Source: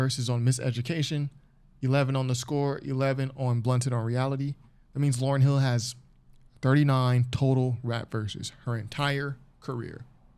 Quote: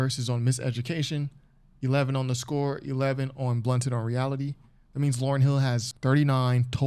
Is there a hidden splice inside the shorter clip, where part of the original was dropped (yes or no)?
yes